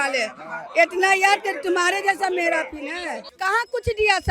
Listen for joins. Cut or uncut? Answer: cut